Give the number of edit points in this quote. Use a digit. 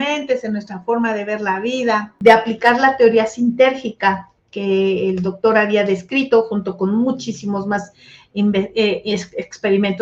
1